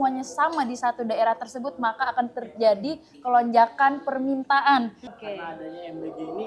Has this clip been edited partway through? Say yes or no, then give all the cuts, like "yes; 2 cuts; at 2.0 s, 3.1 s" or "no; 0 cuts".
yes; 1 cut; at 5.0 s